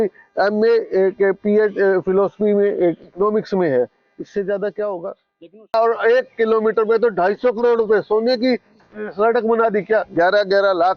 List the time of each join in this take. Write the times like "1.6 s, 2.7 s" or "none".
5.7 s